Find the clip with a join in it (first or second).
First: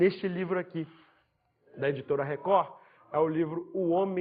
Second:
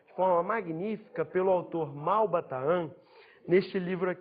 second